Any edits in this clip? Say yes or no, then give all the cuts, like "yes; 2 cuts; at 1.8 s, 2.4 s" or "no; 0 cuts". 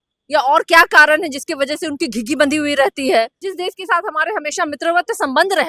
yes; 1 cut; at 3.4 s